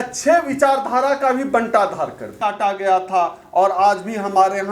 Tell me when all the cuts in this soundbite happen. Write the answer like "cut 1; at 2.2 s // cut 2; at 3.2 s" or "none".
cut 1; at 2.4 s